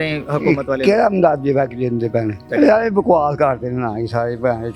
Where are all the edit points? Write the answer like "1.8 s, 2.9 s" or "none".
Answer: 2.4 s